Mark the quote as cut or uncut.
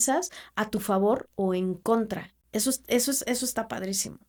uncut